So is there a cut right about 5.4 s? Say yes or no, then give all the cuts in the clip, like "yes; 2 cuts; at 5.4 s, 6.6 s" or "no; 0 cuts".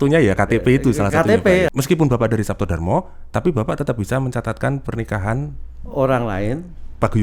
no; 1 cut; at 1.7 s